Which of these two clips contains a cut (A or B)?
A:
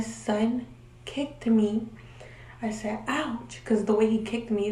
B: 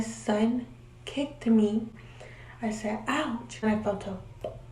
B